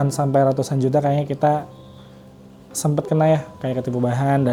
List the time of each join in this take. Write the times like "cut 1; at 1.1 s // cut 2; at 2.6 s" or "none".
none